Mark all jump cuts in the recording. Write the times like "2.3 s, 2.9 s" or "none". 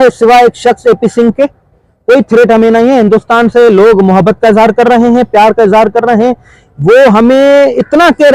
none